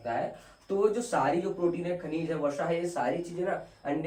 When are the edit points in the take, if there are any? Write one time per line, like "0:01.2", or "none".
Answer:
none